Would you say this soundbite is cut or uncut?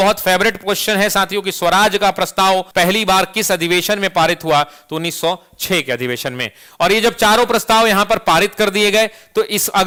uncut